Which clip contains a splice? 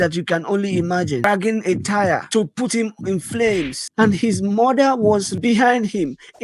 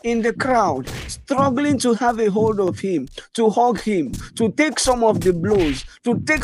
first; 3 cuts; at 1.2 s, 3.8 s, 5.3 s

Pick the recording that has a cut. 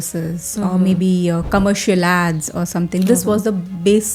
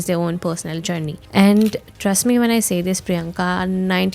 second; 1 cut; at 1.2 s

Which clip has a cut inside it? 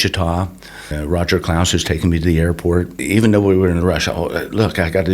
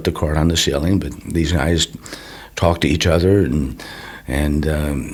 first; 2 cuts; at 0.9 s, 3.0 s

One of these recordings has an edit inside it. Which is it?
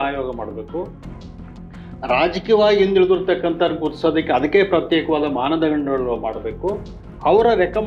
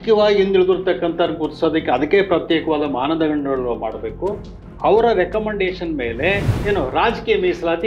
second; 1 cut; at 6.5 s

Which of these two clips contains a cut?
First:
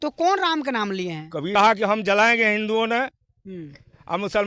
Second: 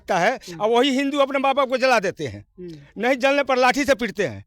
first; 1 cut; at 1.5 s

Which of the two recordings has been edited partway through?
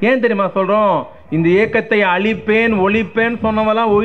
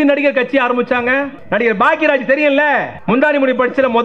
second; 2 cuts; at 1.4 s, 2.9 s

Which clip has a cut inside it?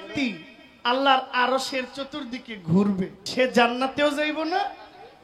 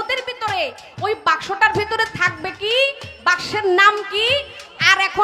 first; 1 cut; at 3.2 s

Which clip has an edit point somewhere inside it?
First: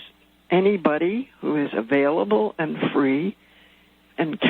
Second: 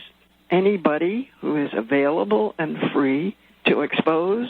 second; 1 cut; at 3.5 s

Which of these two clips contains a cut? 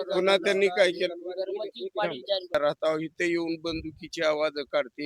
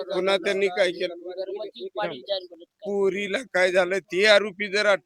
first; 1 cut; at 2.5 s

